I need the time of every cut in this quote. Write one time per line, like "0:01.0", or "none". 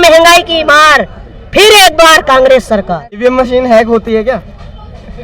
0:03.2

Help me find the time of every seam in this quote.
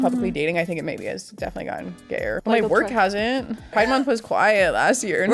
0:02.4
0:03.8

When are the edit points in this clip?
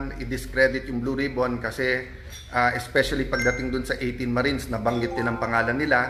none

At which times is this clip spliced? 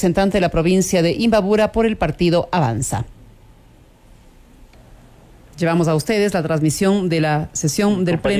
0:04.7

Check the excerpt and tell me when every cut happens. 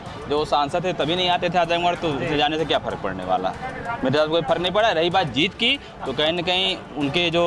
none

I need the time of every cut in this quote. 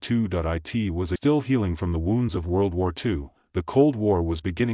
0:01.2

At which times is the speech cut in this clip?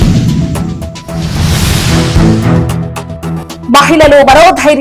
0:02.9

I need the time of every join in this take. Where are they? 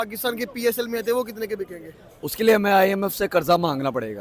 none

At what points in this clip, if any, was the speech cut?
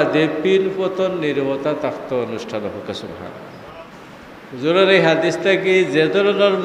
0:03.8

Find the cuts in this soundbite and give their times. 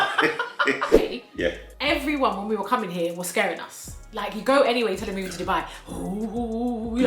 0:01.0

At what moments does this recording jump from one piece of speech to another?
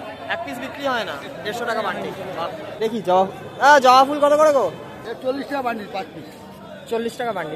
0:02.7
0:05.0

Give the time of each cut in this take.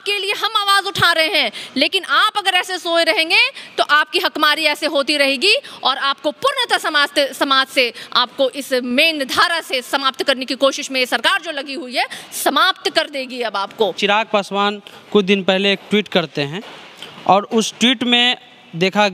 0:14.0

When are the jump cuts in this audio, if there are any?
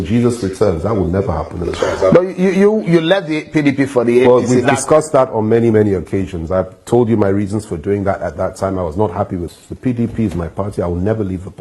0:09.6

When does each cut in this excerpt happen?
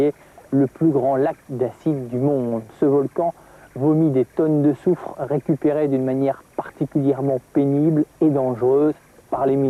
none

